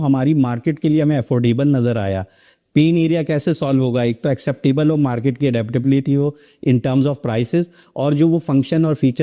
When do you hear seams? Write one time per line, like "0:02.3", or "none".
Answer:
none

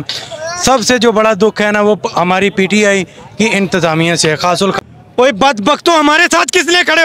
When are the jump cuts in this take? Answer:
0:04.8

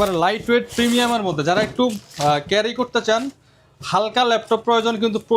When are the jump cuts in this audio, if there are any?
none

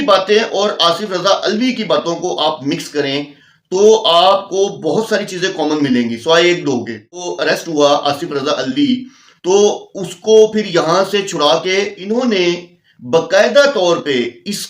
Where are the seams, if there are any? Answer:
0:07.3
0:12.0

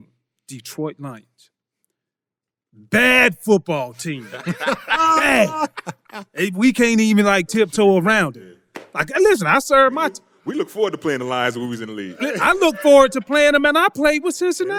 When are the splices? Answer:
none

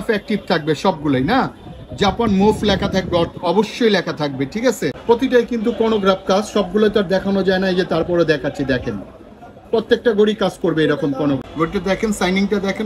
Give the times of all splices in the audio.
0:05.0
0:11.5

